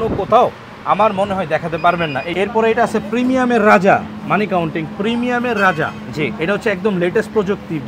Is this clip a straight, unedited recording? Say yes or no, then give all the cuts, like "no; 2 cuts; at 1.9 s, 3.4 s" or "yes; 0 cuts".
no; 1 cut; at 2.3 s